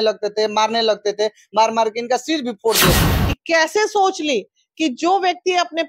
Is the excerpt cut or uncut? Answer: cut